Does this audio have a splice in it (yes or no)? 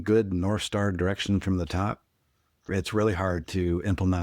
yes